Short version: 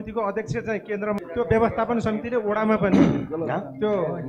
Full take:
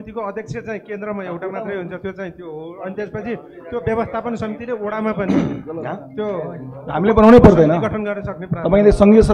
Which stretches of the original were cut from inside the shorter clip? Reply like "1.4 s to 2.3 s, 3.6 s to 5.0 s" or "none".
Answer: 1.2 s to 3.6 s